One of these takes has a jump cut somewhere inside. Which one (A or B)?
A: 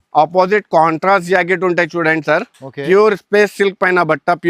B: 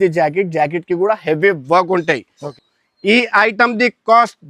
B